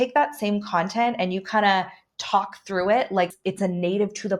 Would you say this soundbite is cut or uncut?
cut